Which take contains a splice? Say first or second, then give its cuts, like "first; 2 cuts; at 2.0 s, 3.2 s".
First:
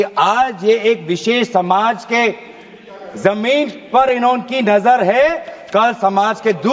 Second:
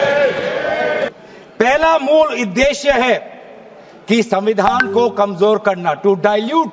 second; 1 cut; at 1.1 s